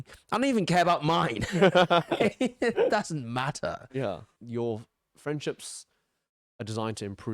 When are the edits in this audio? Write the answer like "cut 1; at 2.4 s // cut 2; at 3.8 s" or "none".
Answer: cut 1; at 4.4 s